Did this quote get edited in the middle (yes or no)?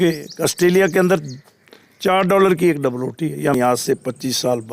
yes